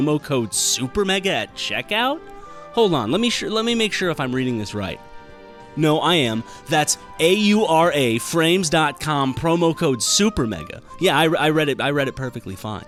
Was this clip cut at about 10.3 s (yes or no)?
no